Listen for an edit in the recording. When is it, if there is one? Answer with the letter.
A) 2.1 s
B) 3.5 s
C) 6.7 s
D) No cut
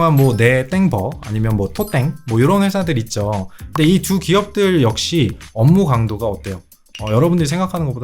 B